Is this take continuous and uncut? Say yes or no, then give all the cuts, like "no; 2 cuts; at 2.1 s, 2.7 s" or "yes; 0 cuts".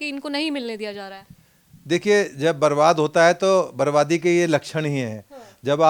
yes; 0 cuts